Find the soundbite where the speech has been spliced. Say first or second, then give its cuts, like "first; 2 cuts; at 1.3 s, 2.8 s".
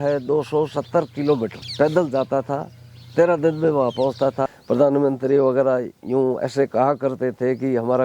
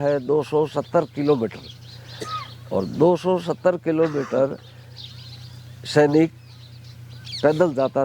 first; 2 cuts; at 1.6 s, 4.6 s